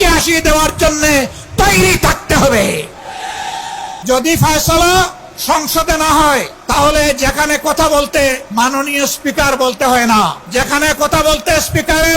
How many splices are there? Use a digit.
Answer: 5